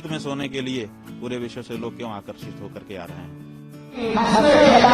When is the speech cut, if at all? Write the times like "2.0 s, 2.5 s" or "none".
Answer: 3.6 s